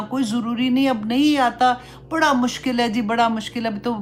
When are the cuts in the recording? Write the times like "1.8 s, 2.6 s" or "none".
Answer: none